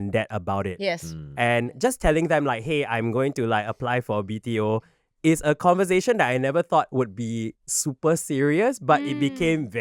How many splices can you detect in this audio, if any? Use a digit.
0